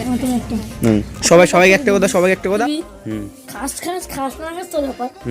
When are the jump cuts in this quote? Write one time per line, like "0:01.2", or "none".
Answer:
0:02.6